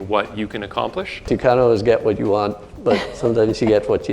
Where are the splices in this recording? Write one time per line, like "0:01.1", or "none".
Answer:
0:01.3